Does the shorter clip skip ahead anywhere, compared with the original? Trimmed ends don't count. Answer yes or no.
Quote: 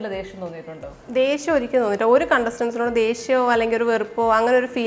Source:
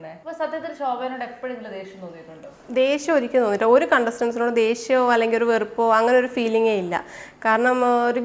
no